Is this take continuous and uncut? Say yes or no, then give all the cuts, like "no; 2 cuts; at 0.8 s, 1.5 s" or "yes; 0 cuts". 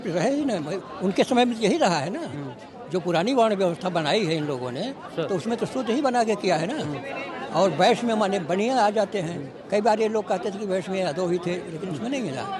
yes; 0 cuts